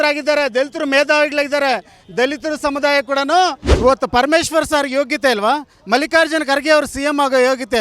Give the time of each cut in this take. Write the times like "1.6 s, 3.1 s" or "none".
3.6 s

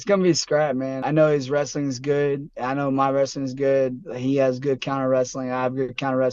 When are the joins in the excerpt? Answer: 1.0 s

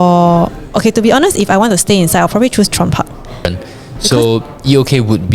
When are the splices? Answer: 3.5 s

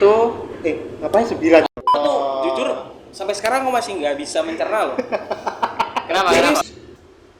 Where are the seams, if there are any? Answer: 1.9 s, 6.6 s

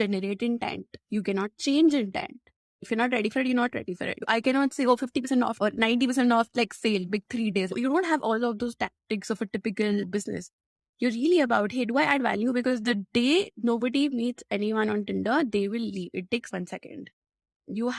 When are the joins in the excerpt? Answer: 7.7 s, 16.5 s

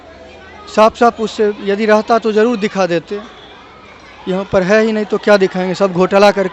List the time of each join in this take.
none

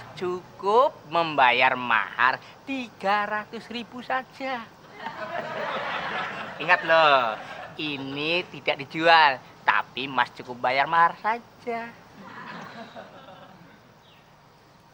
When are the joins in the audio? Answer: none

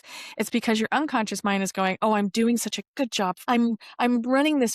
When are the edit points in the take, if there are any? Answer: 3.4 s

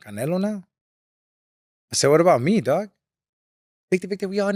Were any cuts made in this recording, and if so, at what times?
none

